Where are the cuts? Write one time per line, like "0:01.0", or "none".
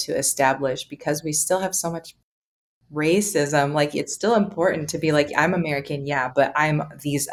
none